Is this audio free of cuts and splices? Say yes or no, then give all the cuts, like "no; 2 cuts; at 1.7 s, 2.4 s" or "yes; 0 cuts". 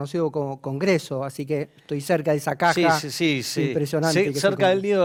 yes; 0 cuts